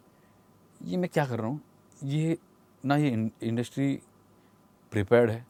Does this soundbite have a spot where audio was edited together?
no; 0 cuts

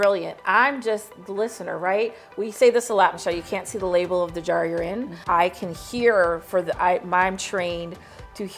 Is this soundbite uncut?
no; 1 cut; at 5.1 s

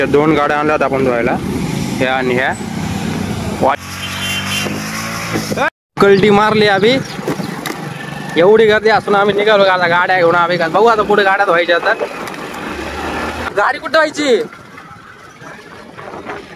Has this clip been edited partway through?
yes; 3 cuts; at 3.8 s, 5.7 s, 13.4 s

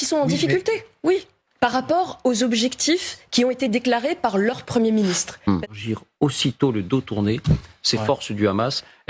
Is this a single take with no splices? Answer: no; 1 cut; at 5.7 s

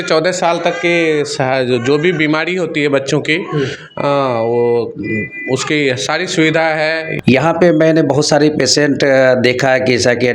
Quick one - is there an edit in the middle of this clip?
yes; 1 cut; at 7.1 s

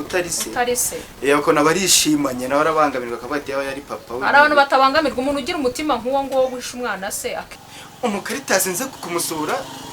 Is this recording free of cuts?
no; 2 cuts; at 7.5 s, 8.9 s

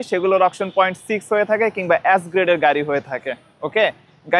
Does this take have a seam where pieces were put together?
no; 0 cuts

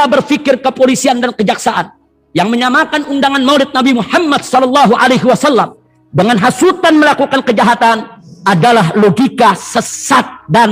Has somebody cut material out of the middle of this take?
no; 0 cuts

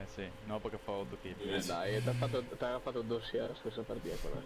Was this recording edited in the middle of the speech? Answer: yes; 1 cut; at 1.5 s

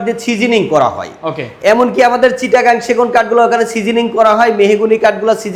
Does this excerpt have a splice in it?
no; 0 cuts

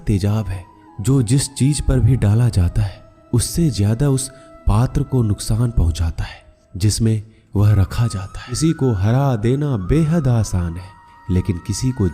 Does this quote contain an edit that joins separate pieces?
yes; 1 cut; at 8.6 s

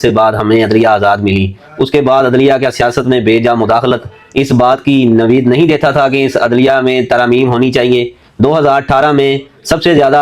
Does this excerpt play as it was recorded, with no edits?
yes; 0 cuts

